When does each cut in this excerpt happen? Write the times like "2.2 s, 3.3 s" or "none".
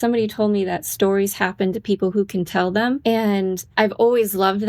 3.0 s